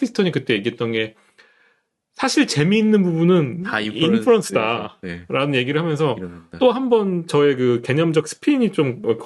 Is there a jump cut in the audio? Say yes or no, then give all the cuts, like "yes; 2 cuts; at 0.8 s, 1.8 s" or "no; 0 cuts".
no; 0 cuts